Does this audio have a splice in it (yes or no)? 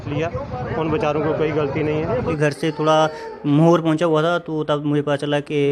yes